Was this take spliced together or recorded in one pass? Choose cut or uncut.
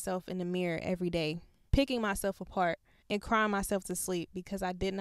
cut